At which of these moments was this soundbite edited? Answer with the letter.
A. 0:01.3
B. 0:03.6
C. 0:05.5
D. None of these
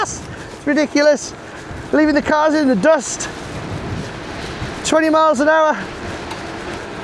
D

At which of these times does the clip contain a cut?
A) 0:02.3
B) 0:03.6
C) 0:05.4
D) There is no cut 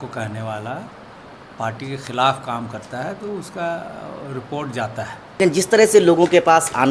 C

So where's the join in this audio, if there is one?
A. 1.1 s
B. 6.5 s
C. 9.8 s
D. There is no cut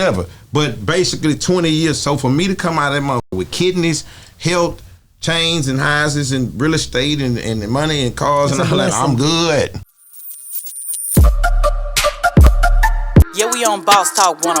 C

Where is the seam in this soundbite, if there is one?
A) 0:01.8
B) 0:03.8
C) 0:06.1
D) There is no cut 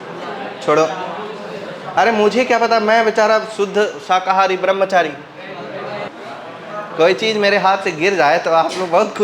C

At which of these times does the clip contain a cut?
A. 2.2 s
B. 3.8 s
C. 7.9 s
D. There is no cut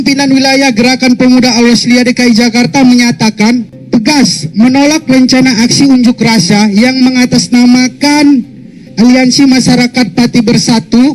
B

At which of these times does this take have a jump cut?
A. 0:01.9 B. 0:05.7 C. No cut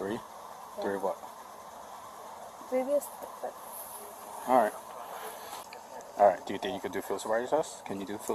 B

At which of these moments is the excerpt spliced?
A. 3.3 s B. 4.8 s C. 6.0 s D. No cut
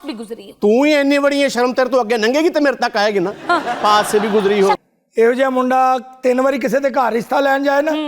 B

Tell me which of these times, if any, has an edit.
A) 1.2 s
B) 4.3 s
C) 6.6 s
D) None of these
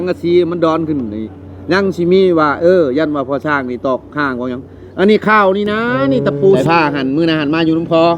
C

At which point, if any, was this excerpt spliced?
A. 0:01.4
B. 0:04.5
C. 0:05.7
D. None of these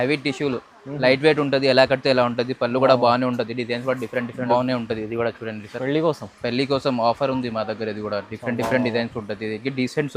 B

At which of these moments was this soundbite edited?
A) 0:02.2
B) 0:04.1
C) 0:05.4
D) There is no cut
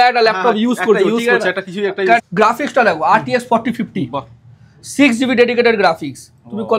A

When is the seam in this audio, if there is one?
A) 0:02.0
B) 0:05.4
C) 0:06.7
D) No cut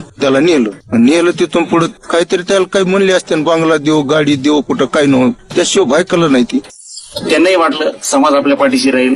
C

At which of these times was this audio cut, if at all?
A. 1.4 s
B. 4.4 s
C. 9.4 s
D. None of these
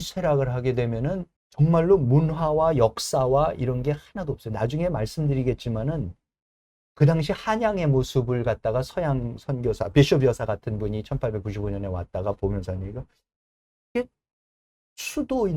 A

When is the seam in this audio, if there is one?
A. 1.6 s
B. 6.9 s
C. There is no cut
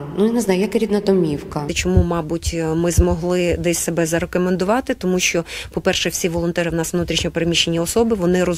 A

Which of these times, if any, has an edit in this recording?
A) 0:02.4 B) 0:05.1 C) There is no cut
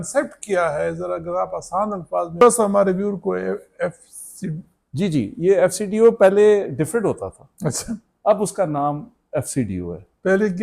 A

